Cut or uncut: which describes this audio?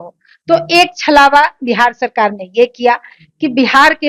uncut